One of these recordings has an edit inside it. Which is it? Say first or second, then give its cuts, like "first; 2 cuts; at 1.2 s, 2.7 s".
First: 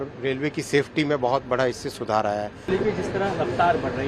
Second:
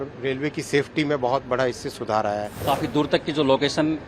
second; 1 cut; at 2.6 s